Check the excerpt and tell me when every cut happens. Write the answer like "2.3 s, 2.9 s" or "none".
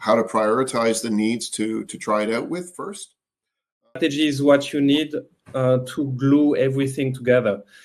3.9 s